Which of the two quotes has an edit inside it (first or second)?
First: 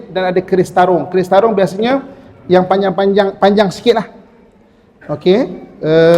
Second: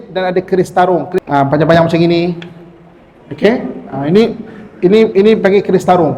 second